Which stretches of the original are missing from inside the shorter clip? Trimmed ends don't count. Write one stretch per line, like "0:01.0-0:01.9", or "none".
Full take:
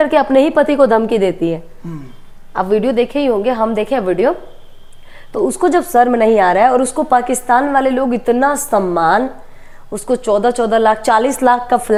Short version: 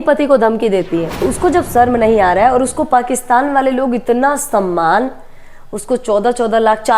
0:01.6-0:05.3